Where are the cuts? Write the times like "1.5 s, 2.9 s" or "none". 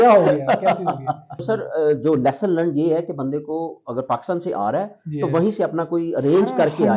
1.3 s

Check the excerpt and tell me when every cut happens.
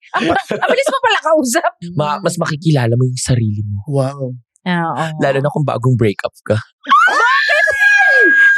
1.8 s

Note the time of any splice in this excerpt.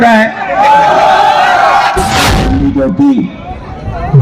2.2 s

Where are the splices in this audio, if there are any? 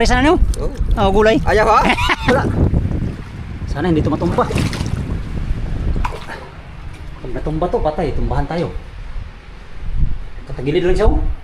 2.2 s

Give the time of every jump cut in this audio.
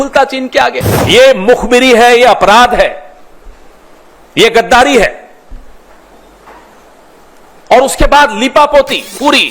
0.9 s

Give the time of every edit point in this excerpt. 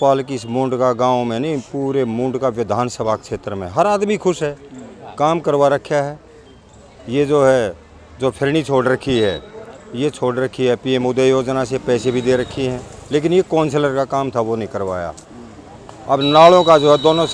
none

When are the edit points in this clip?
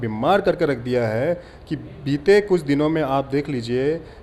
none

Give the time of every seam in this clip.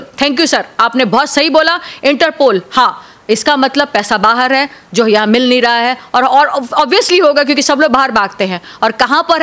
none

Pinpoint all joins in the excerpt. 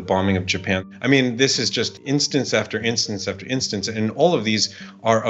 0.8 s, 2.0 s

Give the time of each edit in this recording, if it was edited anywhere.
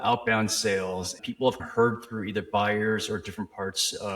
1.2 s

